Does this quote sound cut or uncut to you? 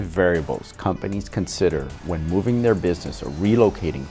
uncut